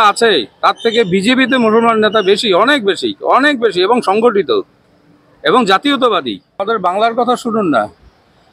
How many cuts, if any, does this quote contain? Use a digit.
1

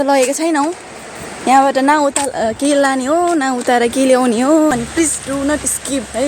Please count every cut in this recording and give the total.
1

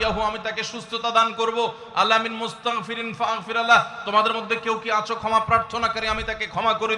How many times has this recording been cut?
0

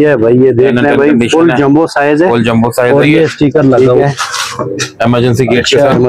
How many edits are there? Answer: 1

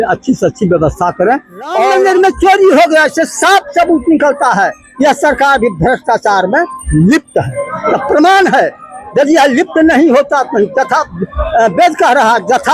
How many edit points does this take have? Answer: 1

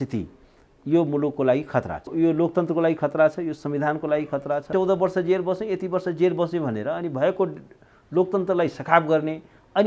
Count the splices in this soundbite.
2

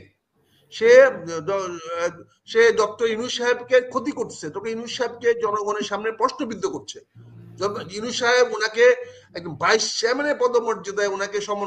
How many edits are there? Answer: 0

